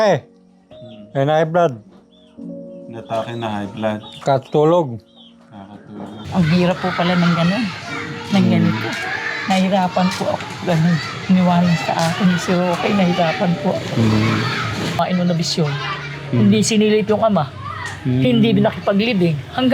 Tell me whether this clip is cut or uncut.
cut